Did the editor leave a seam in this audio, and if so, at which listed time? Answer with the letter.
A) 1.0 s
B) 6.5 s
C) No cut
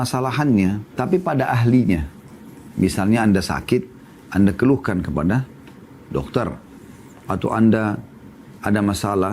A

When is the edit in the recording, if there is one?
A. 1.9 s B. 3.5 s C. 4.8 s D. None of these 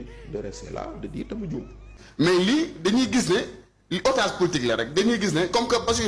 A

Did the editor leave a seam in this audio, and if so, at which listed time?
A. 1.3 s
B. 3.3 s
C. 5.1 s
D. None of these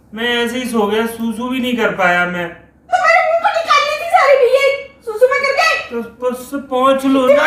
D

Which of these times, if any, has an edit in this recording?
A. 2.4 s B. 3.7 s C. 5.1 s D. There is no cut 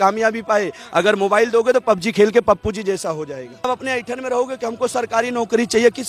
B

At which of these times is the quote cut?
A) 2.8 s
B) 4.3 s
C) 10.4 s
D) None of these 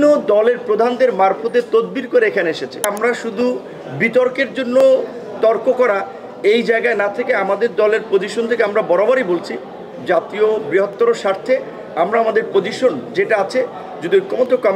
A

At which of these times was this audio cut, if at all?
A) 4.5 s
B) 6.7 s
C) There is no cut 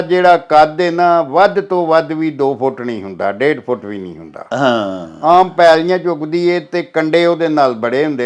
C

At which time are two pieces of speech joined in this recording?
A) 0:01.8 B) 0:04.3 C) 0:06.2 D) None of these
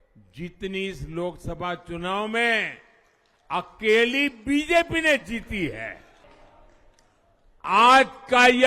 C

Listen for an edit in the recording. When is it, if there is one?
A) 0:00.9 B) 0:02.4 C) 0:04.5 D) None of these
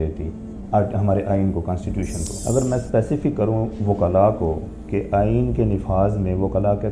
B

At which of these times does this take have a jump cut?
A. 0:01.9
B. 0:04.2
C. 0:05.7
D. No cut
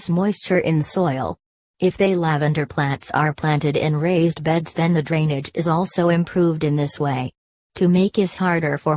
D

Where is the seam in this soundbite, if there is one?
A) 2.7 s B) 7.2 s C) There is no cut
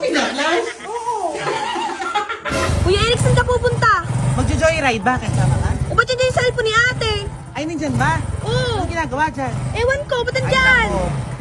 A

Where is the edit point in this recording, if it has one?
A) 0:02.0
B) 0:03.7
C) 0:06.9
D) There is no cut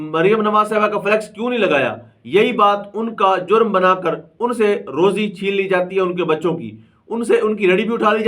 D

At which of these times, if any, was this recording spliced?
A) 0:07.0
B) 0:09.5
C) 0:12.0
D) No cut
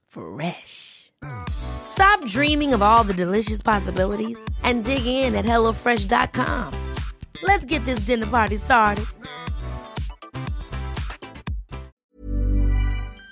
C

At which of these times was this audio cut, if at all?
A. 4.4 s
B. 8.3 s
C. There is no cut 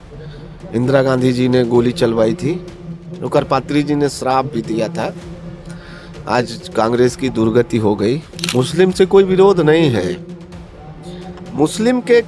B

